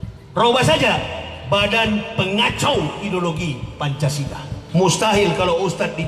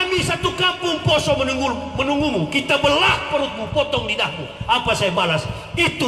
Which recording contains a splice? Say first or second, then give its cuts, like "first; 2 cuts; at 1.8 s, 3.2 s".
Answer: first; 1 cut; at 4.5 s